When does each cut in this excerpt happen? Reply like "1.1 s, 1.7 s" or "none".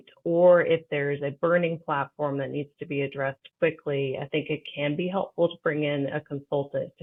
none